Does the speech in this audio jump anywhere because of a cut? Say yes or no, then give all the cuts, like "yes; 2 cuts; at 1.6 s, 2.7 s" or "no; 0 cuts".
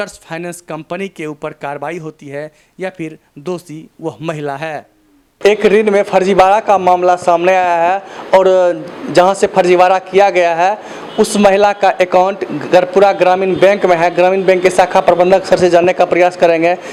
no; 0 cuts